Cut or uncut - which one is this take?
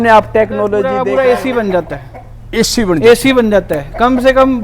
cut